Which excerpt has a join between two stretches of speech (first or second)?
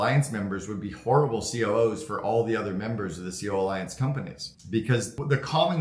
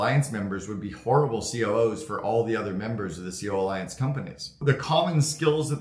second